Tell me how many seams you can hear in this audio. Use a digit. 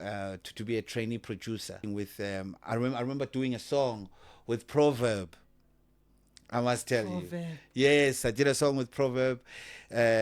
1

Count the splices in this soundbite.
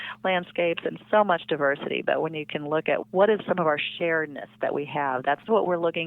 1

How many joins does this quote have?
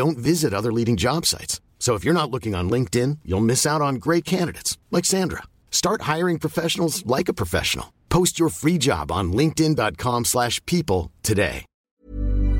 1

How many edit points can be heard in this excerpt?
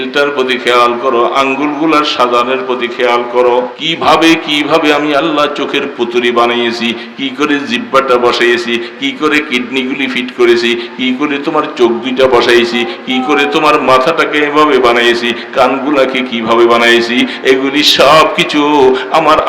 1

